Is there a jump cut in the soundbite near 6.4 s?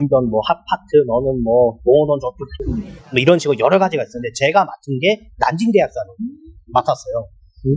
no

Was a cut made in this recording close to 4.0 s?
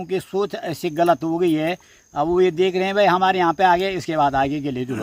no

